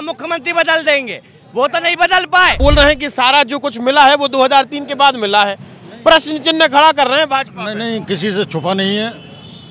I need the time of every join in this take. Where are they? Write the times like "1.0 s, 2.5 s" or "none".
2.6 s